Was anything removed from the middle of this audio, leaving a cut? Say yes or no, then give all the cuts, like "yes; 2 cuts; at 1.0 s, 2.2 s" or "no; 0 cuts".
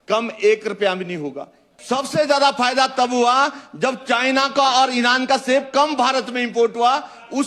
yes; 1 cut; at 1.7 s